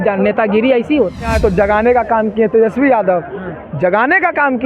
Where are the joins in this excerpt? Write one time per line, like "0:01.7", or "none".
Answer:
0:01.3